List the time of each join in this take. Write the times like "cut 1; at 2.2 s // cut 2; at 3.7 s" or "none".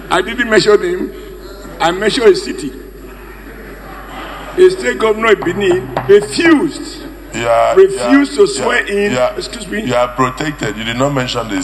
none